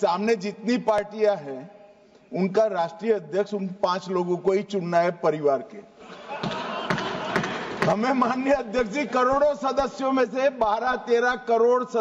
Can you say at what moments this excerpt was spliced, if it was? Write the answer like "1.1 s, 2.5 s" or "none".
none